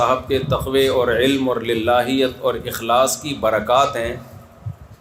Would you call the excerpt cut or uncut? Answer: uncut